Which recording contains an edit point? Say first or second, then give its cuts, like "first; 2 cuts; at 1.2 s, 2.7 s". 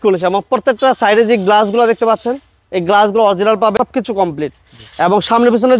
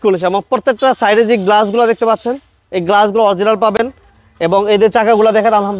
first; 1 cut; at 3.7 s